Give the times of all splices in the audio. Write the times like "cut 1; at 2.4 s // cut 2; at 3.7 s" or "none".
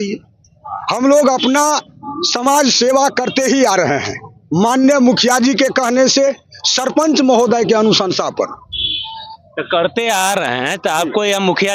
none